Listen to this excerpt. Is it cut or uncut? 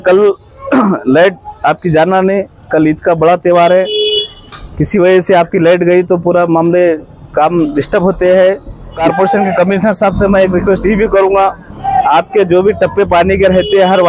cut